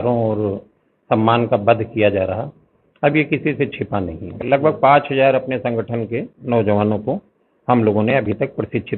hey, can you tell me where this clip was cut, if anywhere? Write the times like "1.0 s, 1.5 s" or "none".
4.3 s